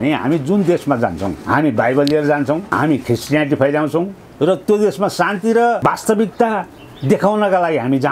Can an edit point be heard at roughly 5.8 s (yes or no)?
yes